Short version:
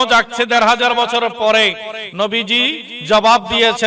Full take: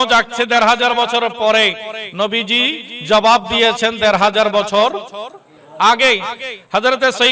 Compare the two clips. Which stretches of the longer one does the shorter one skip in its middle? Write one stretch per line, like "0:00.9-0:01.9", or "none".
none